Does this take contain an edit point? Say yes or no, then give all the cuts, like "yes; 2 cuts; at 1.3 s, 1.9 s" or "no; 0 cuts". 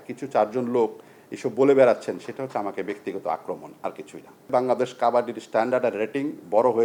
no; 0 cuts